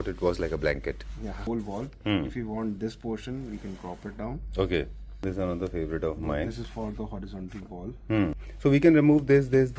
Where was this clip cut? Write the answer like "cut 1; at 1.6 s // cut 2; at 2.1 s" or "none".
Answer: cut 1; at 1.4 s // cut 2; at 5.2 s // cut 3; at 8.4 s